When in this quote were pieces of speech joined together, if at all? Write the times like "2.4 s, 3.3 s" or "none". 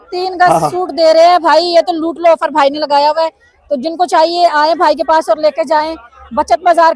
none